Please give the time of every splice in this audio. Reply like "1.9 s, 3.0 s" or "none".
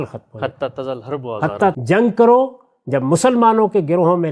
1.8 s